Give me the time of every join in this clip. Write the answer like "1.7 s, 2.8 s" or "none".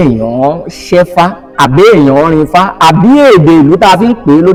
none